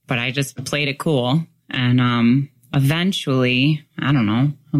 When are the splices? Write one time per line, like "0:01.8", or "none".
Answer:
none